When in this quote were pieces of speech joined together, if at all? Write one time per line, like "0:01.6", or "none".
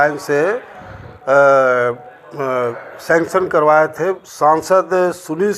0:04.2